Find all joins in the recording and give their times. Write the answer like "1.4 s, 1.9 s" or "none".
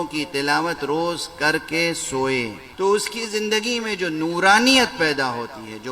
2.6 s